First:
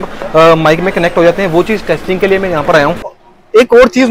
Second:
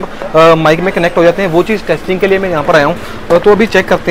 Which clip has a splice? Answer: first; 1 cut; at 3.2 s

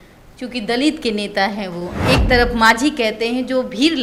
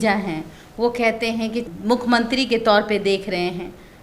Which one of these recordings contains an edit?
second; 1 cut; at 1.7 s

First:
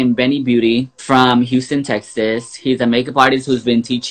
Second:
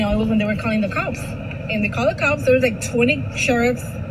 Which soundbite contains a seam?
first; 1 cut; at 0.9 s

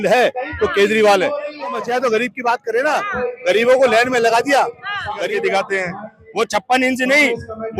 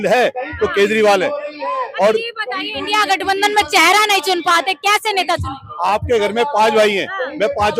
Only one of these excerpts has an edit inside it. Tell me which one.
first; 2 cuts; at 1.8 s, 5.3 s

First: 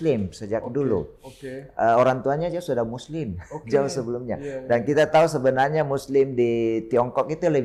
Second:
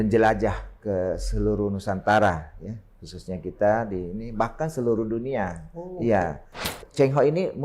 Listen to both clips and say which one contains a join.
second; 1 cut; at 6.7 s

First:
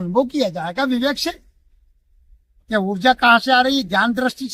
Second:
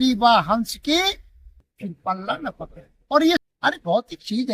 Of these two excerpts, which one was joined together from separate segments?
second; 1 cut; at 3.4 s

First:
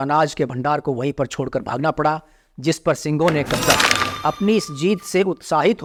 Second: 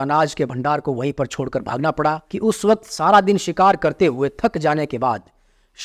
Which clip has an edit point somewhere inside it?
second; 1 cut; at 2.3 s

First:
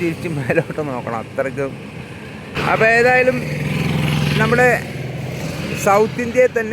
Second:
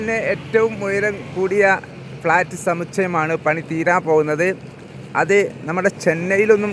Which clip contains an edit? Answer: first; 1 cut; at 2.5 s

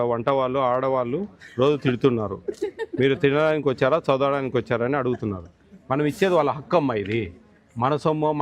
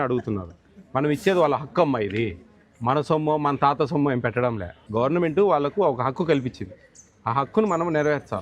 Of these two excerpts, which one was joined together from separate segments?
second; 1 cut; at 4.8 s

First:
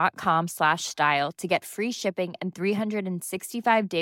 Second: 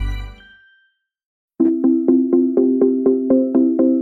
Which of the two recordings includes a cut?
second; 1 cut; at 1.6 s

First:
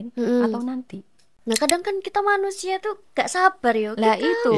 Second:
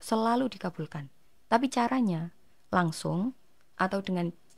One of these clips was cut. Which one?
first; 1 cut; at 1.3 s

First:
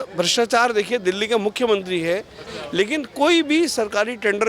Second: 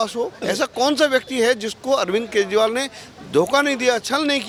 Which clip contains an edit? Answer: first; 1 cut; at 2.5 s

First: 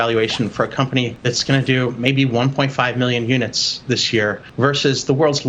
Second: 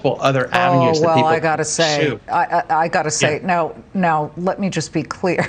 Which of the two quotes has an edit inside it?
first; 2 cuts; at 1.1 s, 4.4 s

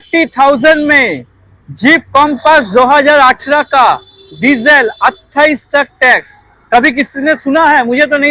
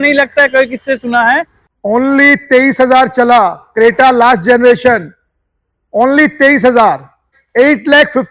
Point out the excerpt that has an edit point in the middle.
second; 2 cuts; at 1.6 s, 7.4 s

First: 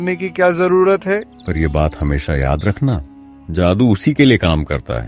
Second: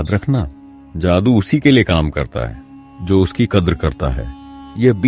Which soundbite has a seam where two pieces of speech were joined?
first; 1 cut; at 1.3 s

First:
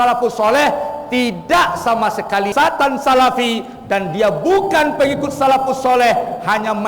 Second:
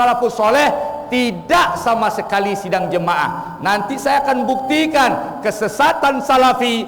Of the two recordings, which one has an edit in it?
first; 1 cut; at 2.5 s

